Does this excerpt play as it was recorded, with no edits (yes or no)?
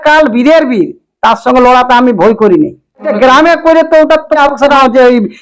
no